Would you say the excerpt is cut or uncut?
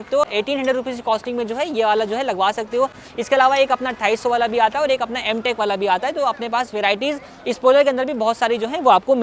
uncut